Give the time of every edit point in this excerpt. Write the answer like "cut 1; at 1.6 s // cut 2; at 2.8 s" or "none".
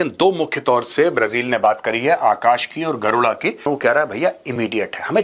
cut 1; at 3.7 s